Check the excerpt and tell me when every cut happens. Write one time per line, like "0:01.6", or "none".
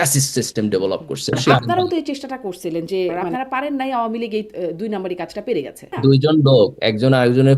0:01.4
0:03.2
0:05.9